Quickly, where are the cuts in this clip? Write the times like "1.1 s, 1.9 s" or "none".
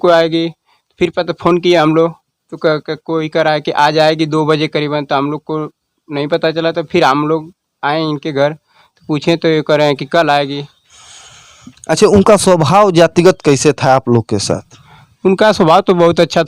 none